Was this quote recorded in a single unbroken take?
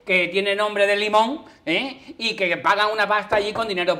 yes; 0 cuts

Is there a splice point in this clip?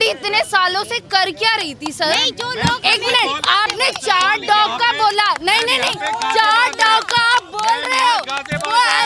no; 0 cuts

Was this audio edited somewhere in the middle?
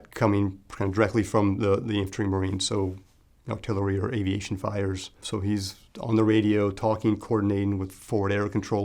yes; 1 cut; at 5.2 s

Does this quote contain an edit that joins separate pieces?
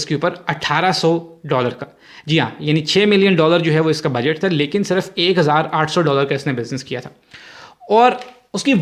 no; 0 cuts

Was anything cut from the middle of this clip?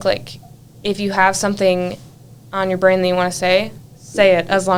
no; 0 cuts

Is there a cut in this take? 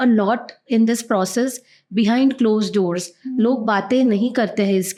no; 0 cuts

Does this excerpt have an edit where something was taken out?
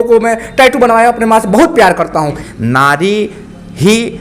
yes; 1 cut; at 2.4 s

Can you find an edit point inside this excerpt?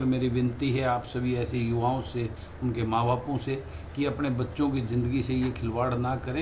no; 0 cuts

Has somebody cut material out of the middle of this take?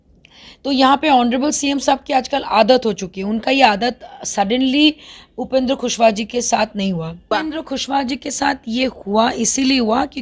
yes; 1 cut; at 7.3 s

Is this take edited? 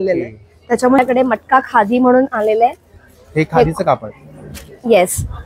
yes; 1 cut; at 1.0 s

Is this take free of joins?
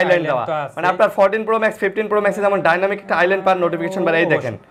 yes; 0 cuts

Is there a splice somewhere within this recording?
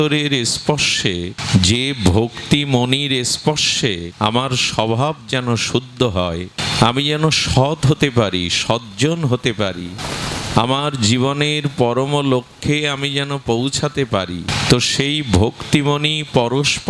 yes; 5 cuts; at 1.4 s, 4.1 s, 6.6 s, 10.0 s, 14.5 s

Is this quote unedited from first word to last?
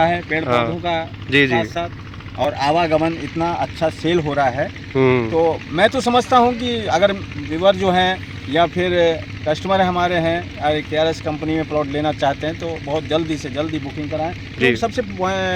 yes; 0 cuts

